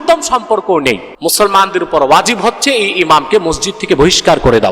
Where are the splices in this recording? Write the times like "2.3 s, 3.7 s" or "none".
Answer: 1.1 s